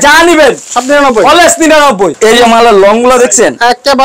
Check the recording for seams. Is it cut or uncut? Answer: cut